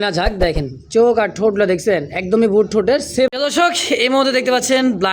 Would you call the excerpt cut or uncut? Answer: cut